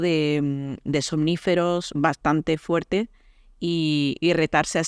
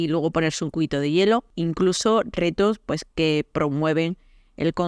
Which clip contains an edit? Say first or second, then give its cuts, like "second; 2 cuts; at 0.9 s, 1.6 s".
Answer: second; 1 cut; at 1.5 s